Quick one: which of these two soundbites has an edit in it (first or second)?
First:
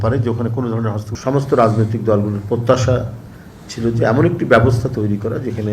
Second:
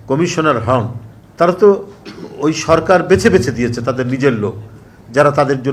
first